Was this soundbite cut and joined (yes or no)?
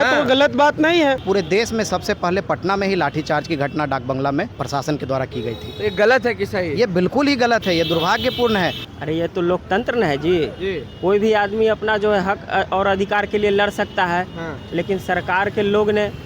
yes